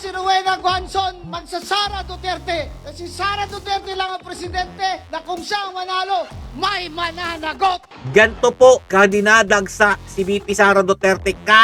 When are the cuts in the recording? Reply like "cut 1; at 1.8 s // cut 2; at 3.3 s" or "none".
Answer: cut 1; at 5.0 s // cut 2; at 7.9 s

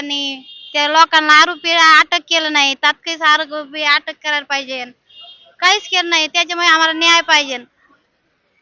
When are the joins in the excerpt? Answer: none

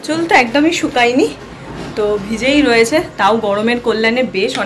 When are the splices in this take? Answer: none

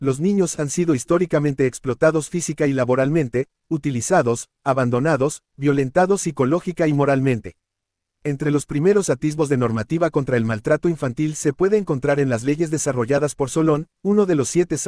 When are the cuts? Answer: cut 1; at 8.0 s

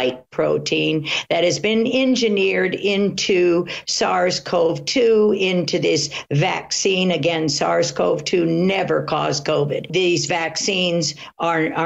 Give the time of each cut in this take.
cut 1; at 9.9 s

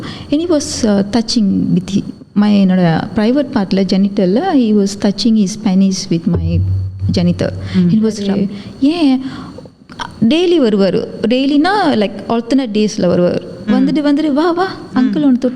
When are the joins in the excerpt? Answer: cut 1; at 8.3 s

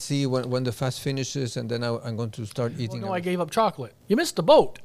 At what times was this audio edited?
cut 1; at 3.1 s // cut 2; at 3.9 s

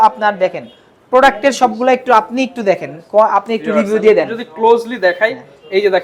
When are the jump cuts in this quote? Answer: none

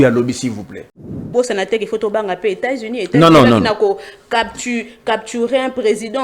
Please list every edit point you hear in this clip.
cut 1; at 1.3 s

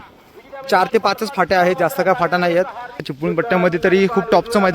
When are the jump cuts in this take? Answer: cut 1; at 3.0 s

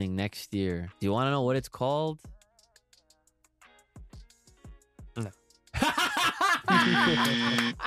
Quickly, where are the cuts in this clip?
cut 1; at 0.9 s

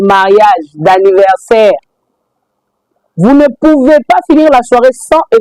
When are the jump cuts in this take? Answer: none

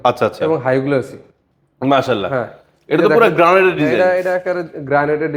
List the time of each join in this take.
none

